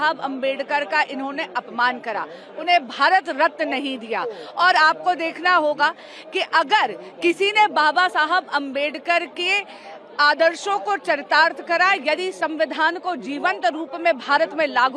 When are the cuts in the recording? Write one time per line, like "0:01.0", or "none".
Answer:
none